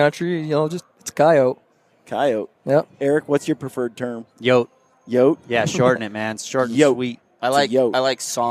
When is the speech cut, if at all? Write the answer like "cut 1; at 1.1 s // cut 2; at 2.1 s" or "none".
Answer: none